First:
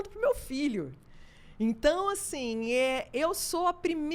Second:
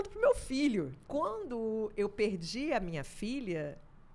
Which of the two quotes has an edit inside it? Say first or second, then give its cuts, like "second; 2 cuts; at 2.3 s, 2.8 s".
second; 1 cut; at 1.0 s